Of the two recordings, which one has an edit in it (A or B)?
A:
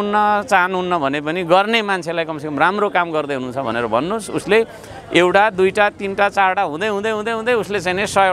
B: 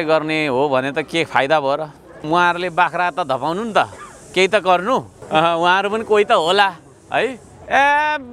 B